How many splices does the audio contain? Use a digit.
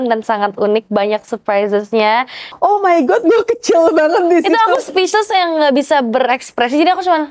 1